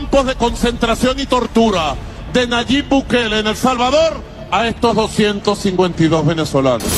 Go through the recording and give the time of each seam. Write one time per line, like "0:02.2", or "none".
none